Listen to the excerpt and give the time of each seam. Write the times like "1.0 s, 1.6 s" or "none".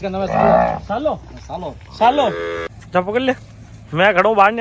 2.7 s